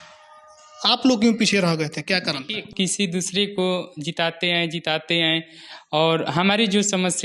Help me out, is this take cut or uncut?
cut